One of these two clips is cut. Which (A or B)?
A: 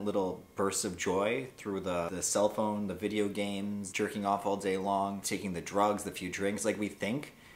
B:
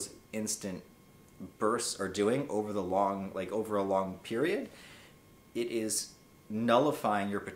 A